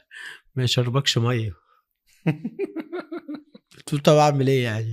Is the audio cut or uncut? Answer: uncut